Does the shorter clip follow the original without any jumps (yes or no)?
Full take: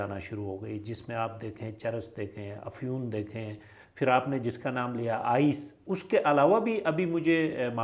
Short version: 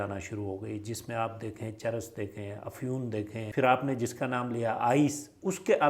no